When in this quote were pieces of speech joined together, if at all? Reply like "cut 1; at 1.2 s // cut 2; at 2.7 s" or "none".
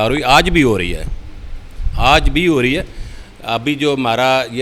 none